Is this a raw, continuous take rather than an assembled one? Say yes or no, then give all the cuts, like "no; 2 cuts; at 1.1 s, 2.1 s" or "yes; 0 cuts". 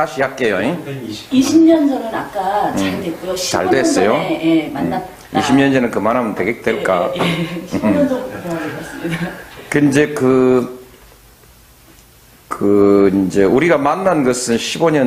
no; 1 cut; at 8.0 s